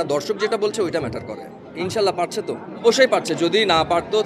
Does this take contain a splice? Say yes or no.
yes